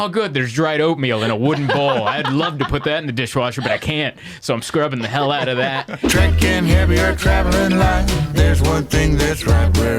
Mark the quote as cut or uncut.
cut